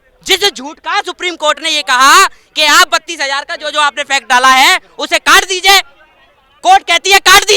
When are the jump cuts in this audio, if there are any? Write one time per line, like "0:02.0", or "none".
none